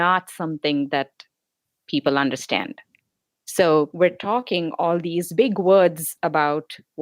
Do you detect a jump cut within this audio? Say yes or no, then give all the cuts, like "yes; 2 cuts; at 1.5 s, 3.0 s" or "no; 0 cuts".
yes; 1 cut; at 3.9 s